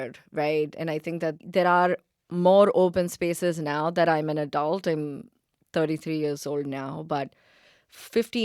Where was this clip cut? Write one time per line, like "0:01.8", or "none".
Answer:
0:01.4